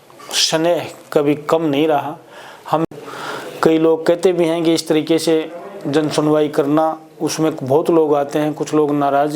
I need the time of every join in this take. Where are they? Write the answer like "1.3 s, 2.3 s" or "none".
2.9 s